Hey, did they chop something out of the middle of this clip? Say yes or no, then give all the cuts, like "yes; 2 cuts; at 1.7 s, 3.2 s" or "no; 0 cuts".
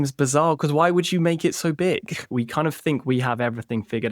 yes; 1 cut; at 2.3 s